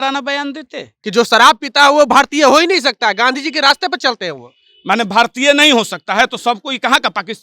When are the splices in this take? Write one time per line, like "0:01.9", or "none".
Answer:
0:00.9